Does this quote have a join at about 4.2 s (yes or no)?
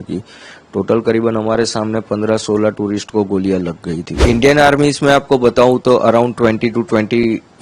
yes